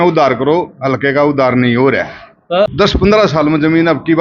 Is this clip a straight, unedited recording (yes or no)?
no